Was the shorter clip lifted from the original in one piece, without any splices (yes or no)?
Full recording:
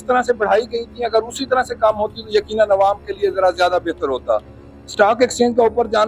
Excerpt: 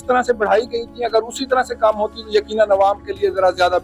yes